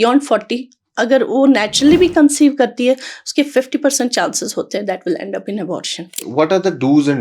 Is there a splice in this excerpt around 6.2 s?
yes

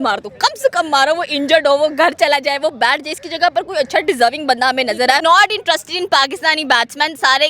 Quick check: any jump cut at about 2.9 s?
no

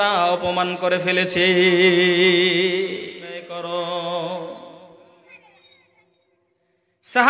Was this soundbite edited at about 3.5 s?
yes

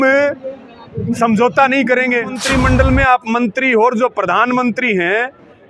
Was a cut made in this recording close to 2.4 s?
yes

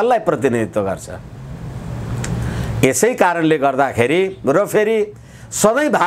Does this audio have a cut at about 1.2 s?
no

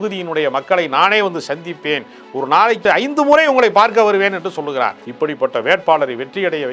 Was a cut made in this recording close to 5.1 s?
yes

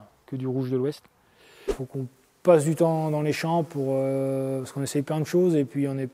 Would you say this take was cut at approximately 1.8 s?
yes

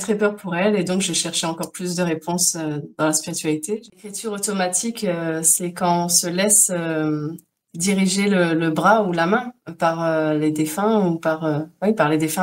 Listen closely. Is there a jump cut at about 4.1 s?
yes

